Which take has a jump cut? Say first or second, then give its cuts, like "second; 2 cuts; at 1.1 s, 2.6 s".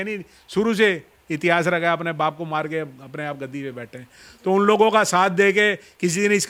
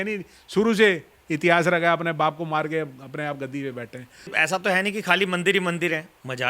second; 1 cut; at 4.3 s